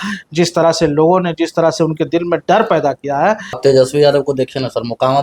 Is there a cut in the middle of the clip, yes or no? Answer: yes